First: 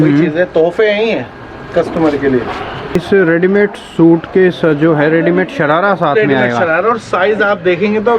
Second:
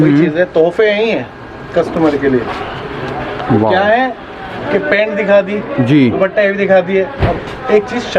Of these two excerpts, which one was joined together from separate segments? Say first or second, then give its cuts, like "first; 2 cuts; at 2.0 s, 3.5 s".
first; 1 cut; at 3.0 s